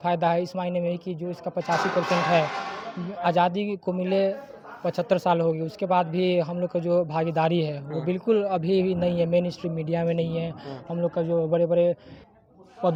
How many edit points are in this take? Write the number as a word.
zero